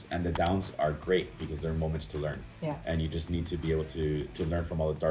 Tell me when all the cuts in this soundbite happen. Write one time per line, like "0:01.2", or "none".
none